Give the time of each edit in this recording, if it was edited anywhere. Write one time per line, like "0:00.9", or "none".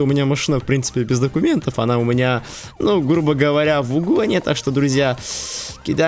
none